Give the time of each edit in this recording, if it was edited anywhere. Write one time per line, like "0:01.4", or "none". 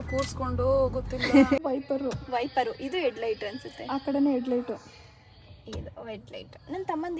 0:01.6